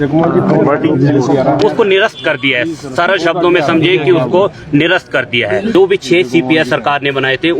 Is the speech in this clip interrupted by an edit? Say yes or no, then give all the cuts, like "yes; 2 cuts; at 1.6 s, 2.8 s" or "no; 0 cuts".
yes; 1 cut; at 5.7 s